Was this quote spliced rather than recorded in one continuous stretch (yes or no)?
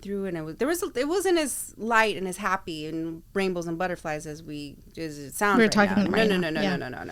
no